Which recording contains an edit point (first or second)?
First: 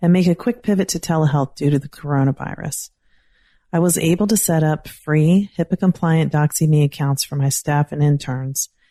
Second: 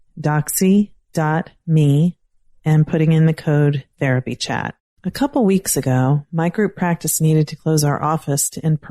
second